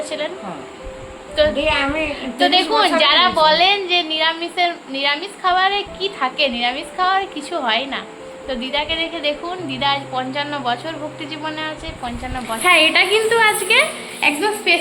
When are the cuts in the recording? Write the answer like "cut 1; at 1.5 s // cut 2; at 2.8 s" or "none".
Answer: cut 1; at 12.5 s